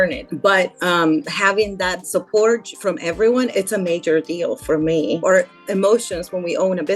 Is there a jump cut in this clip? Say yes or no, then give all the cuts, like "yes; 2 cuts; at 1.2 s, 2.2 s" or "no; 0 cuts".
yes; 3 cuts; at 2.1 s, 2.7 s, 5.2 s